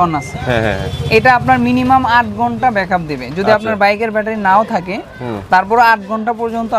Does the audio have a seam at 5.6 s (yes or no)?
no